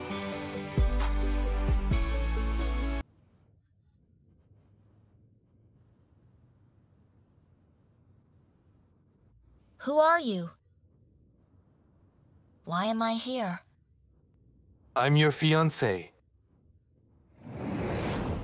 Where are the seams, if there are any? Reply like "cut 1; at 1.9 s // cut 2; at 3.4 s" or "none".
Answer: cut 1; at 3.0 s